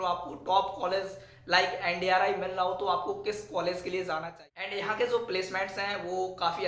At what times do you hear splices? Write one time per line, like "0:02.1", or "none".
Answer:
0:04.7